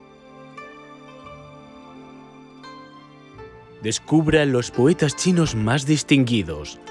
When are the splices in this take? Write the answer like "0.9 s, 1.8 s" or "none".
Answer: 3.8 s